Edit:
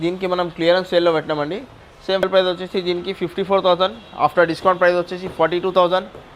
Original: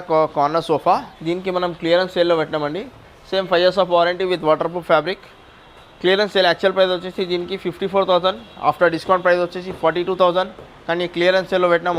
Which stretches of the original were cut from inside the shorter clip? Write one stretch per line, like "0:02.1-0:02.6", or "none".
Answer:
0:03.5-0:06.7